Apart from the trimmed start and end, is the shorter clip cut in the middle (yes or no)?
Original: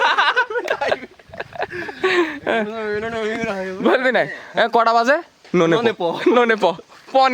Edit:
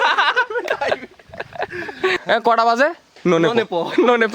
yes